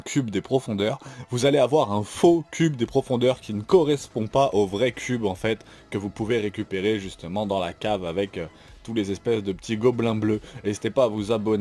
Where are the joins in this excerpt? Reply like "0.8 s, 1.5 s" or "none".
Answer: none

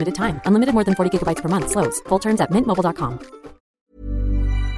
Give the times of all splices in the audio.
3.8 s

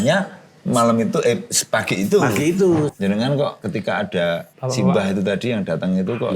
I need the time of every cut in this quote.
2.9 s, 3.6 s, 4.5 s

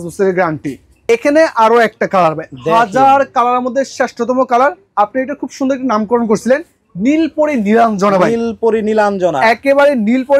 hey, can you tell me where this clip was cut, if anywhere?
0.9 s

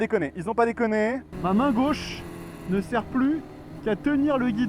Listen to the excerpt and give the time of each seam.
1.3 s

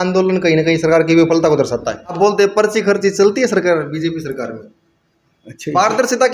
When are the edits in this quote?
2.1 s

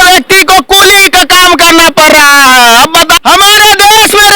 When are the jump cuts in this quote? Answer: 3.1 s

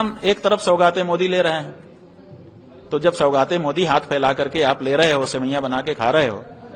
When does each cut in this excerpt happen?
none

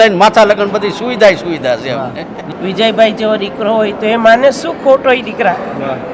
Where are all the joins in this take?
2.5 s

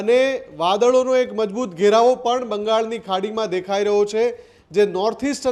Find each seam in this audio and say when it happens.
none

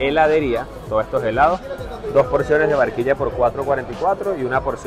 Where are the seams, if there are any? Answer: none

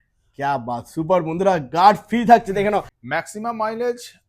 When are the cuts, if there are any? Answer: 2.9 s

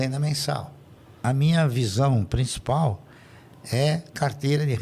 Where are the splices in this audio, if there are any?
1.2 s

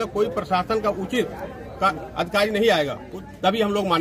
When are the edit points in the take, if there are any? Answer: 3.1 s

